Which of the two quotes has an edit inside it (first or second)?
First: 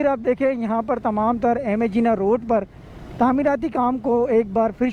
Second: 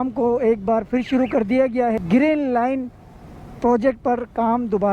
second